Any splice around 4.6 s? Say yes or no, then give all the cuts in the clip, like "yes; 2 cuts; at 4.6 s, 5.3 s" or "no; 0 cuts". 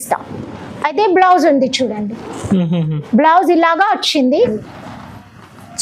yes; 1 cut; at 4.6 s